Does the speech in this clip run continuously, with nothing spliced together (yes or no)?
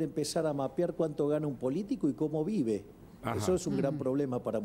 yes